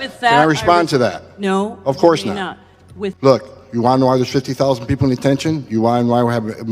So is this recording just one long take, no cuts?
no; 1 cut; at 3.1 s

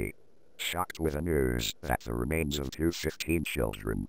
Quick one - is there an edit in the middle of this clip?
no; 0 cuts

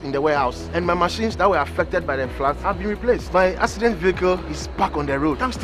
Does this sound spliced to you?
no; 0 cuts

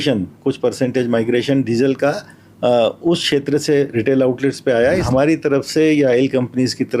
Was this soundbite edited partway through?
yes; 1 cut; at 5.0 s

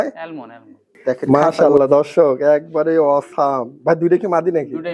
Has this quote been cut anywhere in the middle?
yes; 1 cut; at 1.2 s

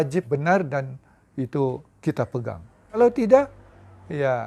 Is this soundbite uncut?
yes; 0 cuts

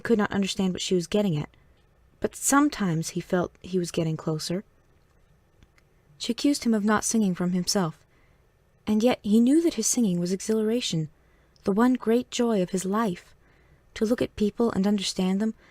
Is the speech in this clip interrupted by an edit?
yes; 1 cut; at 4.7 s

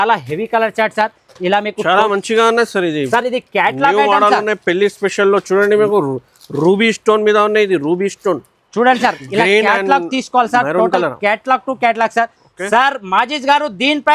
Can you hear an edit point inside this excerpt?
no; 0 cuts

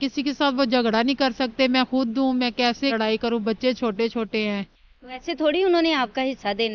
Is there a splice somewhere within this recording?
yes; 1 cut; at 2.9 s

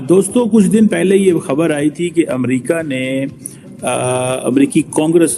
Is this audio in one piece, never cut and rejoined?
yes; 0 cuts

